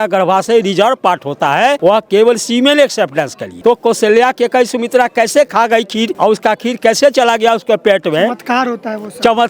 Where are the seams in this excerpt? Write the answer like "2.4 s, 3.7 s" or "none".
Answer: 1.8 s, 3.4 s, 6.1 s